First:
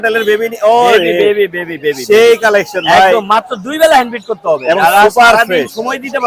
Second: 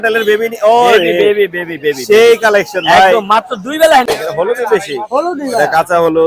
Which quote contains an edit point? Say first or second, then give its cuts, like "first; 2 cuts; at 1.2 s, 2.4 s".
second; 1 cut; at 4.2 s